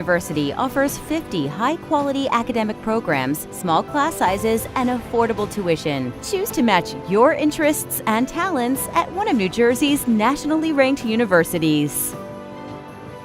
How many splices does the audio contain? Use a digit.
1